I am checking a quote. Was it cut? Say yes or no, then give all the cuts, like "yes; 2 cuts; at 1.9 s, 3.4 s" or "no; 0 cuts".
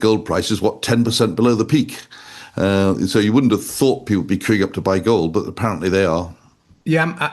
no; 0 cuts